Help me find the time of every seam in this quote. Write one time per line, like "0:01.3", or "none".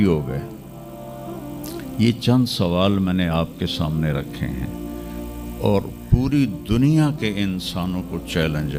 none